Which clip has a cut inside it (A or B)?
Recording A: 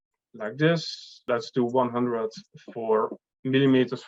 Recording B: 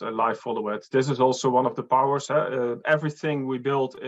A